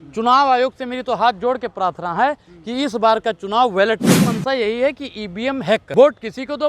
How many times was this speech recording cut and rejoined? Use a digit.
2